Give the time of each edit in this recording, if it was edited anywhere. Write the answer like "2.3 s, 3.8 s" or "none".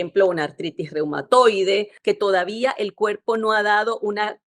1.9 s